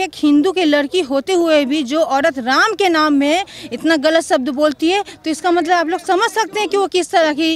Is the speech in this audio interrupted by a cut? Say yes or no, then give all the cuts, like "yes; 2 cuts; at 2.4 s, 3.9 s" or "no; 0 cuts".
no; 0 cuts